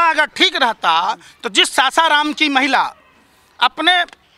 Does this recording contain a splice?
no; 0 cuts

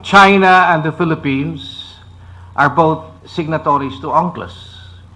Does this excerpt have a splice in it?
no; 0 cuts

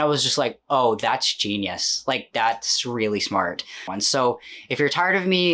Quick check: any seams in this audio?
yes; 1 cut; at 3.9 s

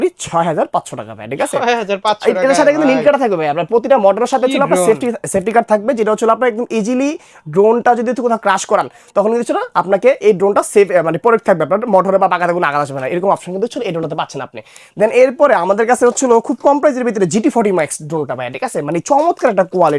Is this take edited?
no; 0 cuts

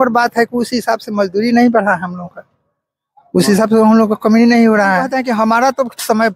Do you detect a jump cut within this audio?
yes; 1 cut; at 5.1 s

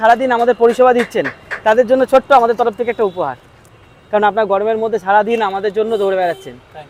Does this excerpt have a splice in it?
no; 0 cuts

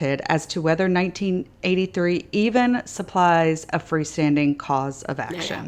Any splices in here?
no; 0 cuts

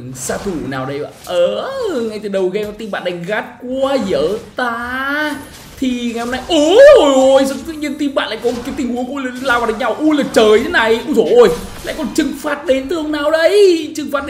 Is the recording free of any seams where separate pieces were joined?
yes; 0 cuts

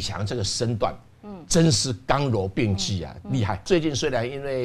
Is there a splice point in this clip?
yes; 1 cut; at 3.7 s

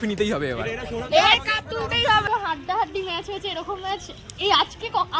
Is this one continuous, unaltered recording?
no; 1 cut; at 2.2 s

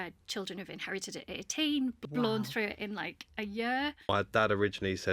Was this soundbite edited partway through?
yes; 2 cuts; at 2.0 s, 4.1 s

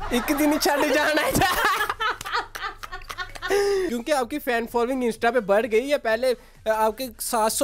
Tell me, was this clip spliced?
yes; 1 cut; at 3.9 s

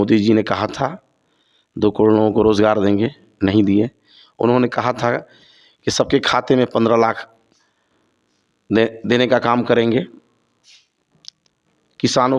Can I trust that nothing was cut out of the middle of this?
yes; 0 cuts

